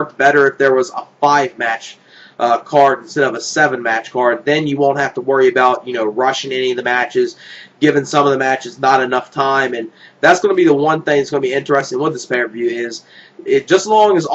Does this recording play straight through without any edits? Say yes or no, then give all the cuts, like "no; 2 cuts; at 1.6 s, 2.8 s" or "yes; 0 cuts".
yes; 0 cuts